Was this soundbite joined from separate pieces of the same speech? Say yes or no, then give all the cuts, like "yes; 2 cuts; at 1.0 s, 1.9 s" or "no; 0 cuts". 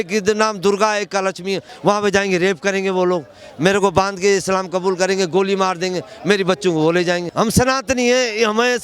yes; 2 cuts; at 1.7 s, 7.3 s